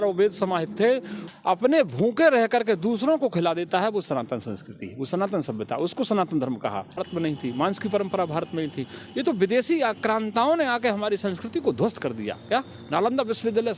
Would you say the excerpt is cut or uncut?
cut